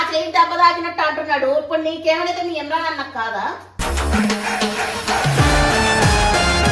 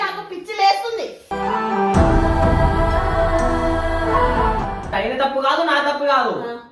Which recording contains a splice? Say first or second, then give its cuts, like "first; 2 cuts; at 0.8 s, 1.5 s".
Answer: second; 1 cut; at 4.9 s